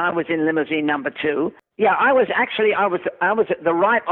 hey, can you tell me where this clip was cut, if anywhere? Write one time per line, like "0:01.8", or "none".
0:01.6